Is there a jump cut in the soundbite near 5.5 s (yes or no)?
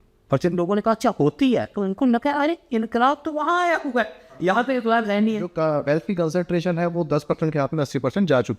yes